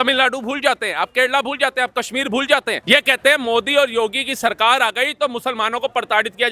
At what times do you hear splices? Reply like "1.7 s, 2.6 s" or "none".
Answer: 2.8 s